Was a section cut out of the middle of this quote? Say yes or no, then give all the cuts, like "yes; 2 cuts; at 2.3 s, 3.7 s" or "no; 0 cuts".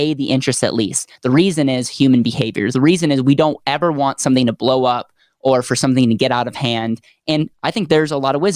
yes; 1 cut; at 7.5 s